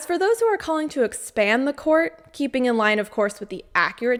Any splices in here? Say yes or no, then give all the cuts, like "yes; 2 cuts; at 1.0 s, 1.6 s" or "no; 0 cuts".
no; 0 cuts